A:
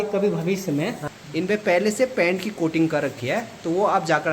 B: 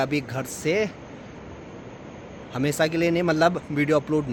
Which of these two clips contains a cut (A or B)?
A